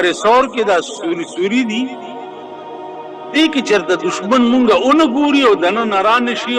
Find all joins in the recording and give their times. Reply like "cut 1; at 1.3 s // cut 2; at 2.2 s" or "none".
cut 1; at 1.9 s // cut 2; at 3.3 s